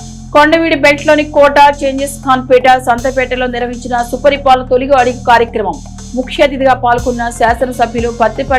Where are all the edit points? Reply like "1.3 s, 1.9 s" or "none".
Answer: none